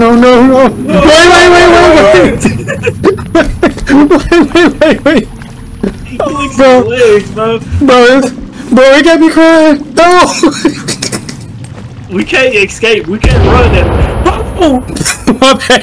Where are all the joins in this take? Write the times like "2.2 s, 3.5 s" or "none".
none